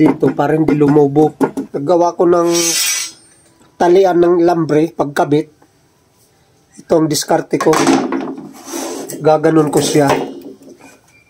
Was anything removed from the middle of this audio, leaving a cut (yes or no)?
yes